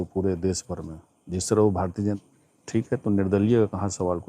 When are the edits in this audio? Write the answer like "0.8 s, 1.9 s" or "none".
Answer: 2.2 s

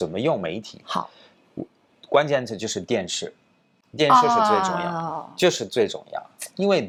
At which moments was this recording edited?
none

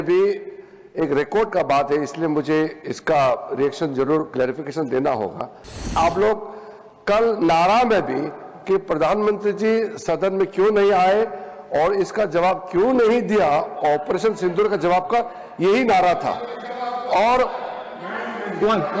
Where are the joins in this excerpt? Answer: 6.0 s

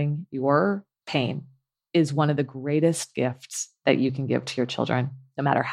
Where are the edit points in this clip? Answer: 0.9 s

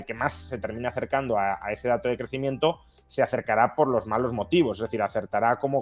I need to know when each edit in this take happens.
none

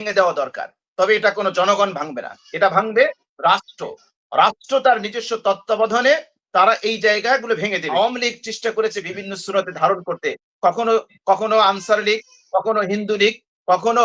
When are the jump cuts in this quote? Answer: 7.9 s

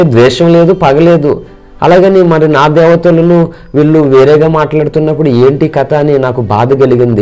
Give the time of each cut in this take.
none

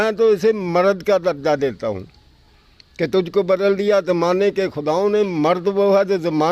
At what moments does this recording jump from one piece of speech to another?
none

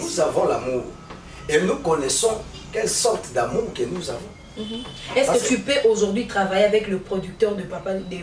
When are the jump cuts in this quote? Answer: none

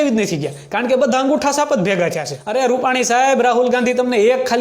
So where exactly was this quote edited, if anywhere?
2.3 s

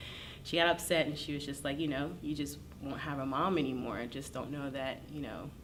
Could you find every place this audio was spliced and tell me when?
none

